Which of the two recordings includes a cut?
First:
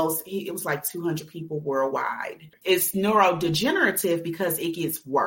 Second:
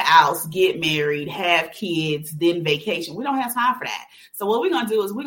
first; 1 cut; at 2.5 s

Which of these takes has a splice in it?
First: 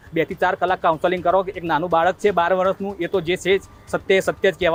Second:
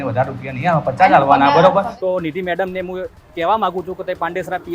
second; 1 cut; at 1.9 s

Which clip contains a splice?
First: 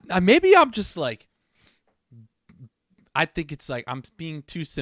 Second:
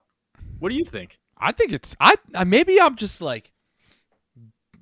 second; 1 cut; at 1.2 s

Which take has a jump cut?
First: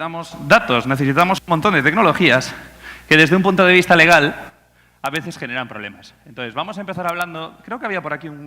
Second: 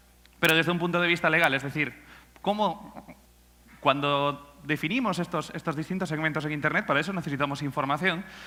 first; 1 cut; at 7.3 s

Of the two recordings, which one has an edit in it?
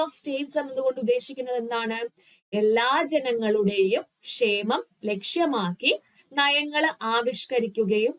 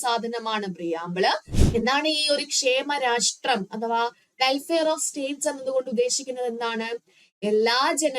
second; 1 cut; at 1.5 s

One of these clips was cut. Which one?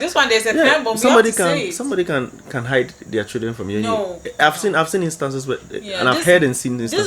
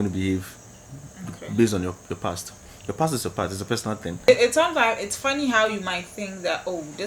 second; 1 cut; at 4.3 s

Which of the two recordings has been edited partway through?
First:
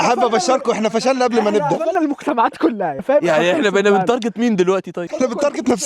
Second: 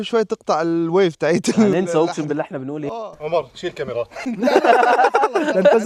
first; 2 cuts; at 3.0 s, 5.1 s

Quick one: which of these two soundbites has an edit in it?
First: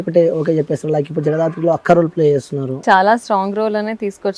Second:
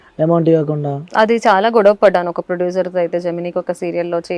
first; 1 cut; at 2.8 s

